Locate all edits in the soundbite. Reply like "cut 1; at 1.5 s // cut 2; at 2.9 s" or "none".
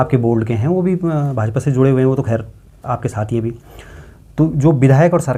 none